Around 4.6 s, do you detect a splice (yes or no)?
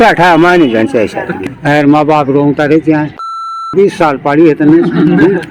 no